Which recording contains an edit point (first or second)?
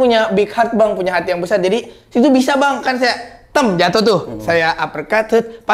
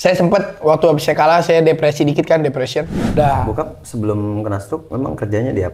second